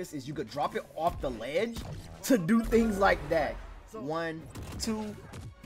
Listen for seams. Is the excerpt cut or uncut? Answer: cut